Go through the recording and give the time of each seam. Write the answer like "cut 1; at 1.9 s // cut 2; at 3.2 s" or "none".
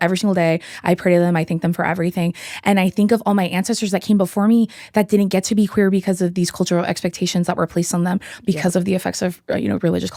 none